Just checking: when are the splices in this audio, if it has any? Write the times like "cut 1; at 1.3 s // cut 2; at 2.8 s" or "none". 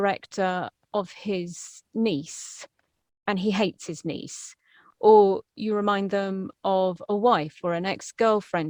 none